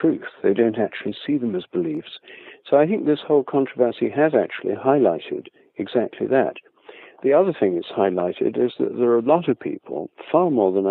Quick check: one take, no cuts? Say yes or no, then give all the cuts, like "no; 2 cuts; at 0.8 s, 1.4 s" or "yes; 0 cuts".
yes; 0 cuts